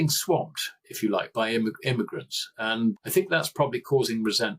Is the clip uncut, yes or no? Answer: no